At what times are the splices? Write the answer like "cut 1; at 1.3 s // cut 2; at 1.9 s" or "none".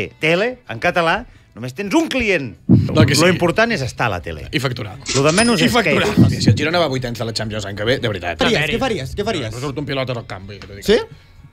cut 1; at 2.7 s // cut 2; at 6.3 s // cut 3; at 8.4 s